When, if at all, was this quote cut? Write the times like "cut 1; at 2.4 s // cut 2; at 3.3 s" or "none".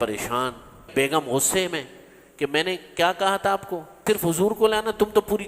cut 1; at 0.9 s // cut 2; at 3.9 s